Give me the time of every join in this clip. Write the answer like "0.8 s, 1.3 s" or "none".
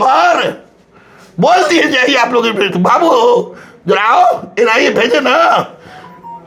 none

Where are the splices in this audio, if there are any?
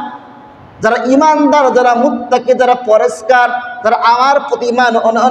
none

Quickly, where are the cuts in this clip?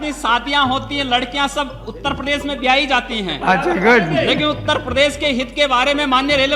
none

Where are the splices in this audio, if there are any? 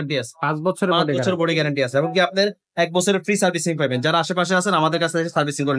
none

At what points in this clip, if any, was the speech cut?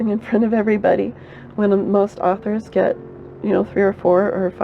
none

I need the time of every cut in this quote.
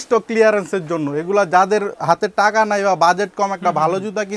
none

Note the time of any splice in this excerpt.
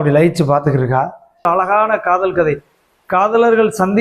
1.5 s

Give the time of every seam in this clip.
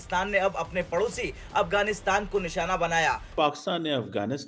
3.3 s

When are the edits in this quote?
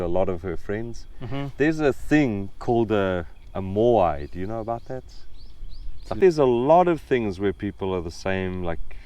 6.2 s

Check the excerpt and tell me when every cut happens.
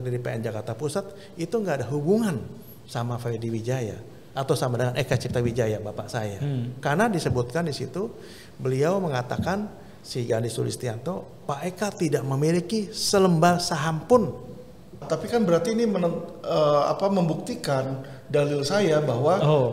15.0 s

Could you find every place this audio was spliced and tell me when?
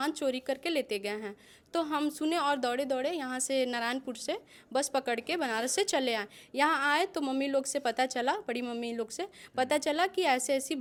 none

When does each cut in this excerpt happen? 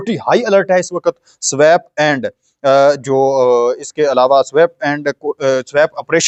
none

